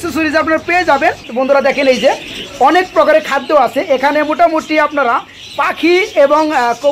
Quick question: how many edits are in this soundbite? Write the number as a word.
one